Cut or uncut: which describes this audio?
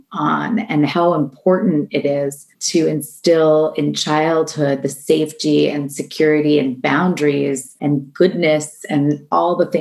cut